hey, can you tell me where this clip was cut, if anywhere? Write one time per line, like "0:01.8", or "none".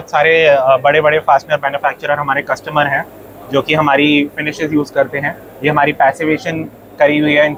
none